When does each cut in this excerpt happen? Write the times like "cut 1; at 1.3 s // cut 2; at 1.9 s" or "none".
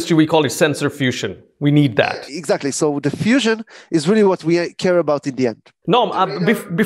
none